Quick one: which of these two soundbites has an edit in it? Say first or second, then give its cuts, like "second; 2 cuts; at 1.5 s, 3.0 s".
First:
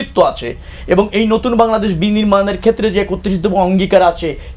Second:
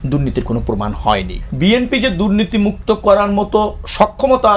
second; 1 cut; at 1.4 s